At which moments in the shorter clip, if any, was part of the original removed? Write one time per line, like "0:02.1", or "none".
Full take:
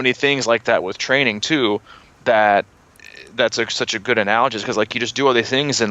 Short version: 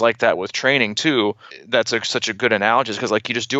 0:01.5